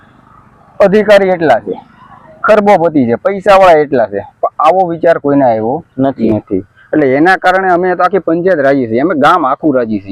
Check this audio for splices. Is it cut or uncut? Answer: uncut